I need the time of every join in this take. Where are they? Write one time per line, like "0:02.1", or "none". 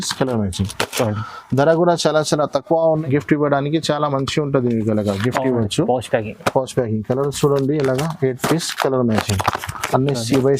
0:03.0